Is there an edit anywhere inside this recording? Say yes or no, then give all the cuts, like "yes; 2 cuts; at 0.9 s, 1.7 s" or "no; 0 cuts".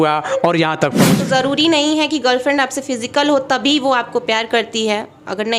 yes; 1 cut; at 1.2 s